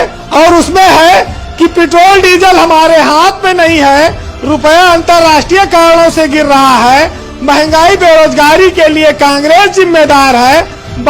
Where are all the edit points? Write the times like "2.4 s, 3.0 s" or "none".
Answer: none

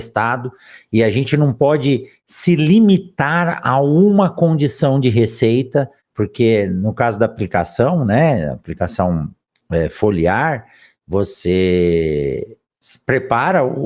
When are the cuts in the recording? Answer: none

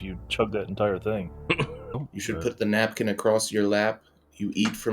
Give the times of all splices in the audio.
1.9 s

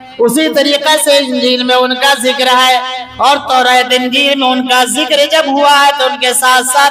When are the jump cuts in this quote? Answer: none

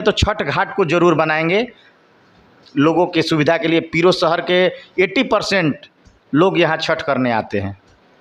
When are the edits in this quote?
none

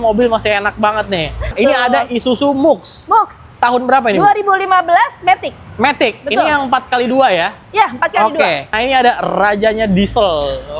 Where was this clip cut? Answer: 1.5 s, 8.7 s

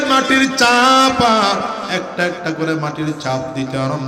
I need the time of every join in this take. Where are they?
none

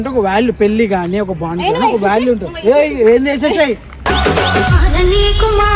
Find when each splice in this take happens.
4.1 s

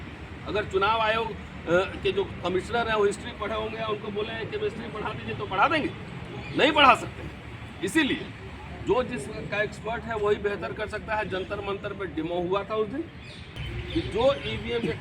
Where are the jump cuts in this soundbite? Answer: 13.6 s

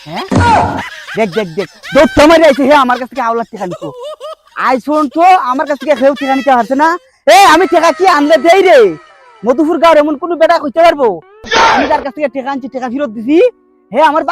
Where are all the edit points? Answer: none

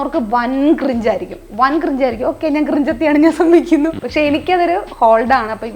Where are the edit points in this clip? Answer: 4.0 s

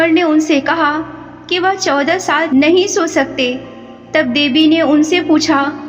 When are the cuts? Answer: 2.5 s

